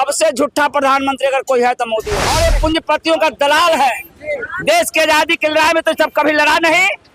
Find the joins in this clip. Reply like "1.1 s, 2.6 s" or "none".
2.1 s